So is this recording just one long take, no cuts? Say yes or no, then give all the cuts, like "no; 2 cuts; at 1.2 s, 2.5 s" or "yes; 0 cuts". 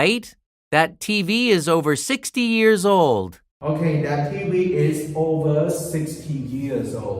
yes; 0 cuts